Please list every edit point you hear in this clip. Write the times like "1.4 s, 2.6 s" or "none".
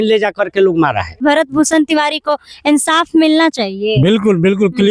1.2 s

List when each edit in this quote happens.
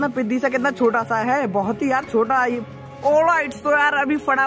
2.6 s

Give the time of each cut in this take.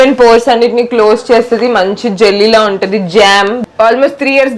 3.6 s

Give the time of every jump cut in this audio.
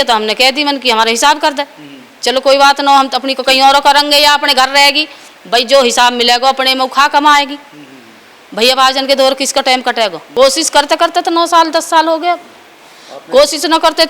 10.2 s

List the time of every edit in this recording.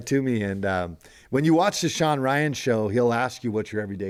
none

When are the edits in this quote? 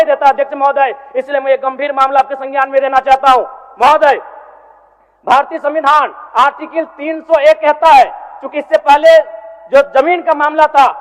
none

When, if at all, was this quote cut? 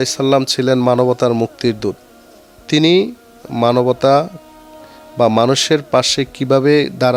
none

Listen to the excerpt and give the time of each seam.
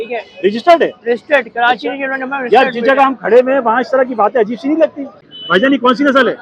5.1 s

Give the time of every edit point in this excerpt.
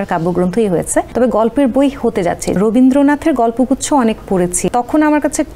1.1 s, 2.6 s, 4.7 s

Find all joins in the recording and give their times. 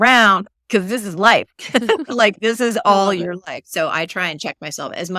none

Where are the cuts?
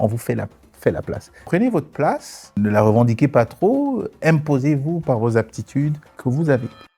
1.4 s, 2.6 s, 6.1 s

